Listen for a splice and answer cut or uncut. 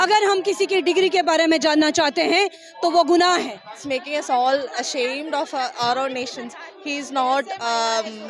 cut